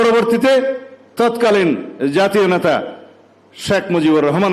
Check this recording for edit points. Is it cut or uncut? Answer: uncut